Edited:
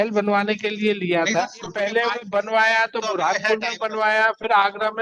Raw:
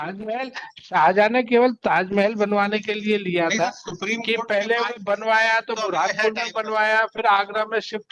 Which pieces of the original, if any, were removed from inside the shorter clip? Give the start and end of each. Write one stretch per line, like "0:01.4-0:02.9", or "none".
0:03.9-0:04.4